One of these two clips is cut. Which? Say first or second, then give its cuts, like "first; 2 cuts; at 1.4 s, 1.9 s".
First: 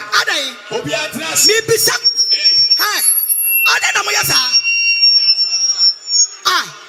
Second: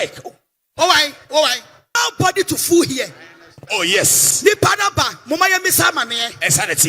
second; 1 cut; at 1.8 s